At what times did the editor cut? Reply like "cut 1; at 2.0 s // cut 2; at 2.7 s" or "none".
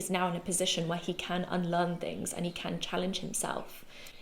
none